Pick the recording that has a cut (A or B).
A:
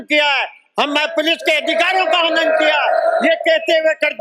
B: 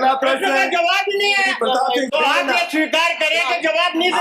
B